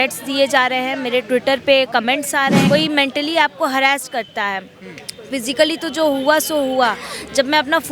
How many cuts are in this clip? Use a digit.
1